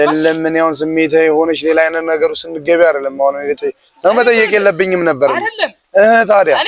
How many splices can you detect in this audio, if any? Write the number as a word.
zero